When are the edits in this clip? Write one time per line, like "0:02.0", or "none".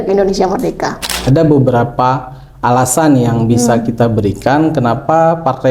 0:01.2